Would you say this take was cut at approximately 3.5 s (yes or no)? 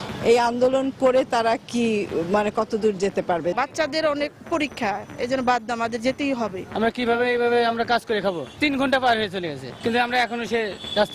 yes